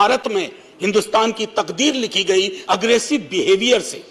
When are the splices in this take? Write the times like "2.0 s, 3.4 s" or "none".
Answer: 2.6 s